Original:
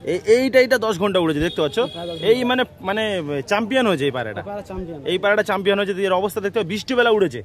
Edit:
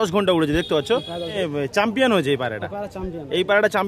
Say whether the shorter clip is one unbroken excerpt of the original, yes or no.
no